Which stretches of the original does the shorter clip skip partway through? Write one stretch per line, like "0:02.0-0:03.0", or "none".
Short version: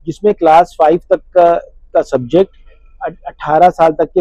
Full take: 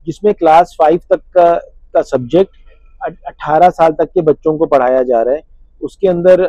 none

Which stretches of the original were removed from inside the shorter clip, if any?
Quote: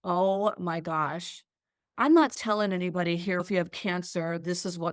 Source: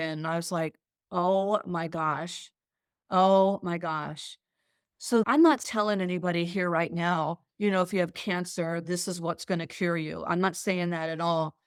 0:03.0-0:05.3
0:06.7-0:07.8

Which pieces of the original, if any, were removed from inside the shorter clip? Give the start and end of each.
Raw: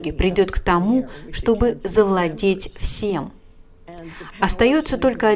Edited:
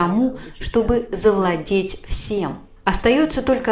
0:03.4-0:04.2

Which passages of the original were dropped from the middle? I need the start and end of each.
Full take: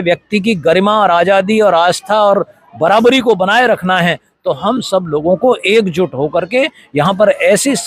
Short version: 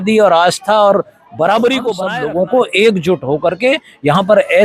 0:03.5-0:05.0

